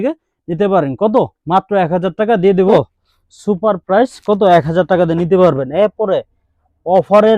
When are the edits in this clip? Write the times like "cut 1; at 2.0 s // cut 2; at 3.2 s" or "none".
cut 1; at 2.6 s